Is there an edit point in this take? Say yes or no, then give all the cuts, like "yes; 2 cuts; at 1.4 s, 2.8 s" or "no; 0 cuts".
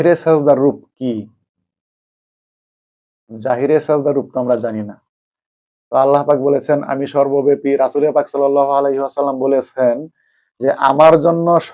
no; 0 cuts